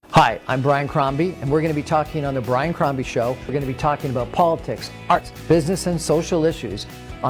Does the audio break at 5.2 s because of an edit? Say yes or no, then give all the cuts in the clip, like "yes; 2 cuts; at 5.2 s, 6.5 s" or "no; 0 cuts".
yes; 1 cut; at 5.2 s